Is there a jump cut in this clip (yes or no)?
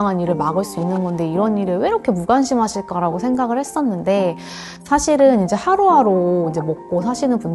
no